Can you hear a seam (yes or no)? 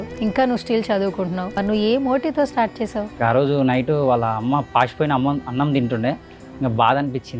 yes